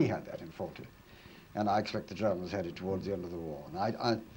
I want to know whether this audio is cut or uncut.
uncut